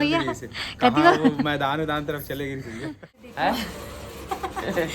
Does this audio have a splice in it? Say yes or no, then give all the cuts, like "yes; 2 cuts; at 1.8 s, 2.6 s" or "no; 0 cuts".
yes; 1 cut; at 3.2 s